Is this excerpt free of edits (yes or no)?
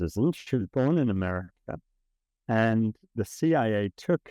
no